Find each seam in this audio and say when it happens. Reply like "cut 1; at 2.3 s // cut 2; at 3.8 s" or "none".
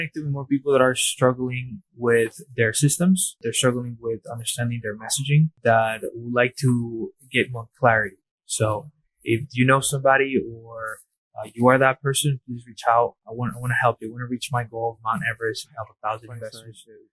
cut 1; at 3.4 s // cut 2; at 5.5 s